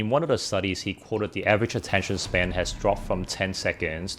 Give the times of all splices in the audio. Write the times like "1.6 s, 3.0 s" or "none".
none